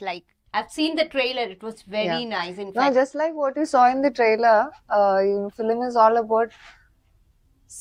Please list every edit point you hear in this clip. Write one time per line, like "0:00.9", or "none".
none

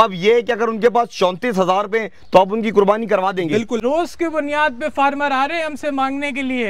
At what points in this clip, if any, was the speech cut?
0:03.8

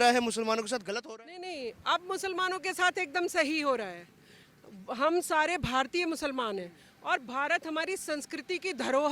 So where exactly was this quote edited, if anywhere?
0:00.9

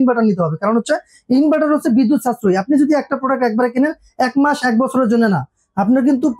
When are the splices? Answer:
none

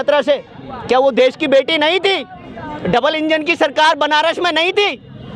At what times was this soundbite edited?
none

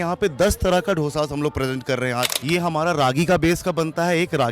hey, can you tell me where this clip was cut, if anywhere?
0:02.4

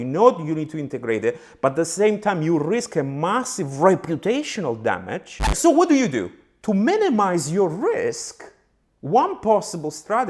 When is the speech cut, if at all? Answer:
0:05.5

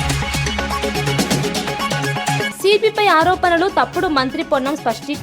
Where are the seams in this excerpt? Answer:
0:02.5

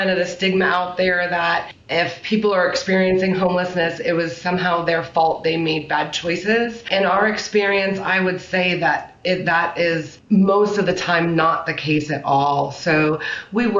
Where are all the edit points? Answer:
0:01.8
0:03.9
0:06.9
0:10.1

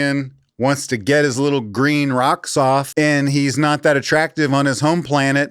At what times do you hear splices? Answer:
0:02.9

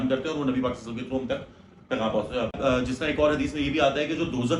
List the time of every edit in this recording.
0:02.5

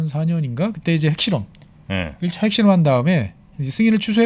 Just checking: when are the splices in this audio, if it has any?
none

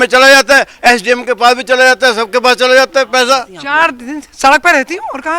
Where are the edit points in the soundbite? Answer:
0:03.6

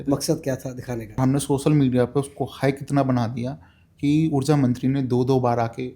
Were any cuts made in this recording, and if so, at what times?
0:01.2

